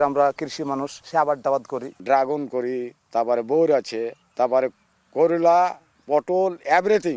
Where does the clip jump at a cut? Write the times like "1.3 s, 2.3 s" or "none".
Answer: 1.0 s, 1.9 s, 3.0 s, 4.2 s, 5.9 s